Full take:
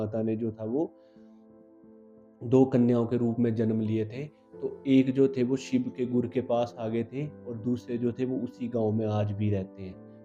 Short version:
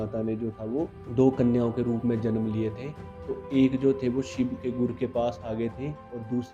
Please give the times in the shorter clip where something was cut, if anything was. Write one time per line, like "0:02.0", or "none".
0:01.0